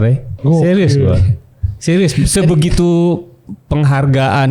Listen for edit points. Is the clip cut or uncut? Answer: uncut